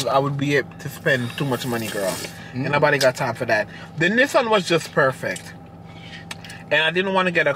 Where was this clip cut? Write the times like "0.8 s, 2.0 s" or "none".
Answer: none